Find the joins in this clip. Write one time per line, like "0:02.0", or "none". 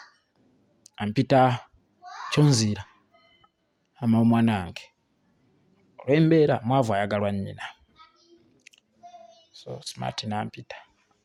none

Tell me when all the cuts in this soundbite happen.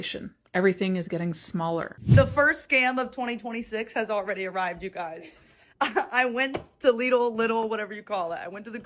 0:01.9

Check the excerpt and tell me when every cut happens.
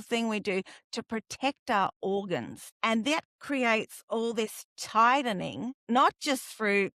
0:02.6
0:05.8

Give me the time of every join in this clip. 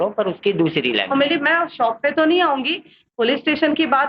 0:01.1

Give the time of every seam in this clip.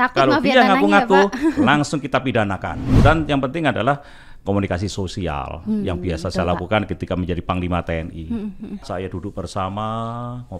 0:02.8
0:08.9

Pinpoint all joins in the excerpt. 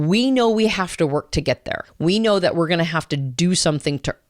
0:01.9

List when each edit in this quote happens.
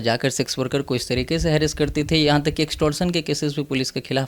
none

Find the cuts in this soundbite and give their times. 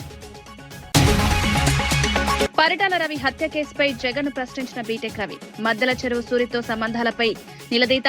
0:00.9
0:02.4

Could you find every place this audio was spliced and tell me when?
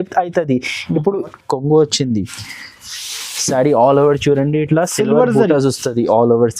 0:01.4

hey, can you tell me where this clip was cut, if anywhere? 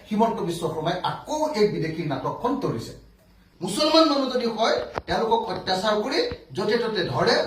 0:03.4

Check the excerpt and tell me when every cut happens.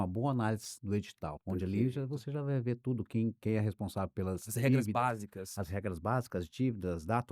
0:01.0

